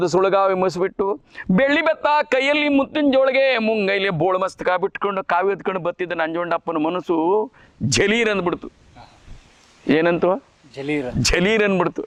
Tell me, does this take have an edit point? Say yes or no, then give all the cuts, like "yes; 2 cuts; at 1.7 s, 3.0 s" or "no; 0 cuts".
no; 0 cuts